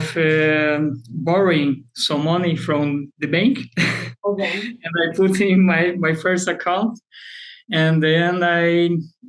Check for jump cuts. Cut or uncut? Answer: uncut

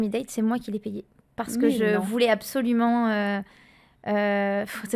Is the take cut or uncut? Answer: uncut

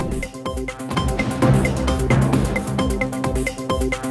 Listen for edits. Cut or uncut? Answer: uncut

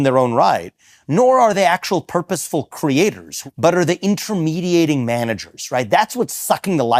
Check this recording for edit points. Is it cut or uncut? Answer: cut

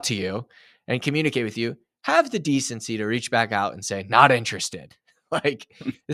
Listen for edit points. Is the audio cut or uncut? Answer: uncut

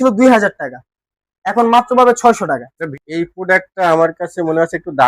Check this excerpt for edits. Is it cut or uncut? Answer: cut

